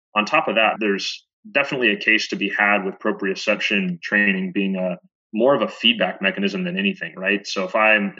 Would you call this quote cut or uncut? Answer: cut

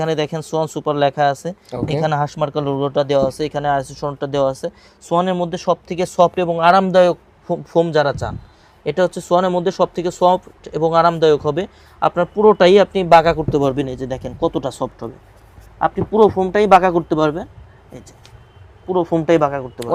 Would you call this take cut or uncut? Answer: uncut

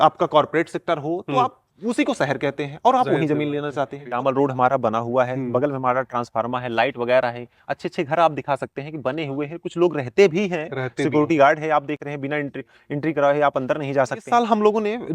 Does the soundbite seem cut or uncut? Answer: cut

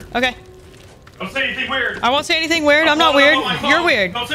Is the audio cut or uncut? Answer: uncut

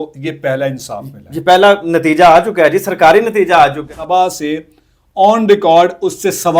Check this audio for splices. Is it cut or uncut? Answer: cut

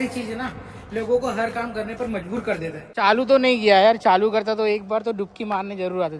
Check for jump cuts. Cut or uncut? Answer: cut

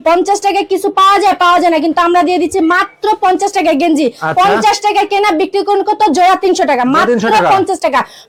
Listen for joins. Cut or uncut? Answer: uncut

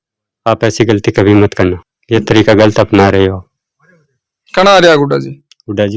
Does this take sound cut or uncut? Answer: uncut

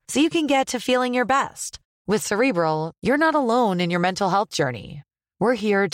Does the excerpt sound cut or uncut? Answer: uncut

